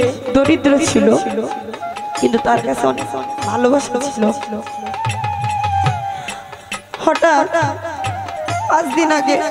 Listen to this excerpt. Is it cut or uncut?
uncut